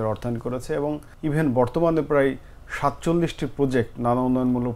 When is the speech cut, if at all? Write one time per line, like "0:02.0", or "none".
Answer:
0:01.1